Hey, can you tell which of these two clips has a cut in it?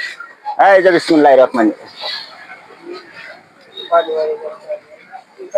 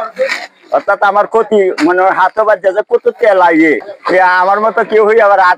second; 1 cut; at 3.9 s

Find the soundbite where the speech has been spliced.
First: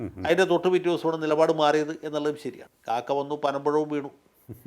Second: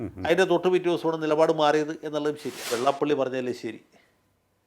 second; 1 cut; at 2.7 s

